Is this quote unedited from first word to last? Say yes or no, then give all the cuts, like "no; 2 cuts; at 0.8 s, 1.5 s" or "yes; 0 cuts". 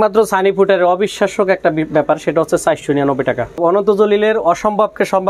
no; 1 cut; at 3.6 s